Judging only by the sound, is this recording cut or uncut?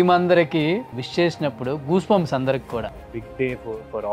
cut